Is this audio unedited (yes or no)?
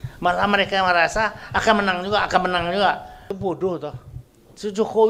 no